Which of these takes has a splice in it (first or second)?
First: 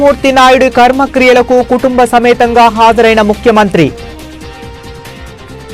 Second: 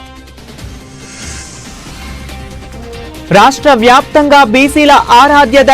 second